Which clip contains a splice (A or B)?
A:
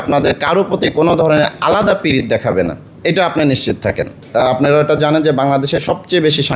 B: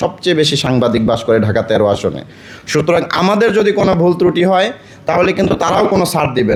A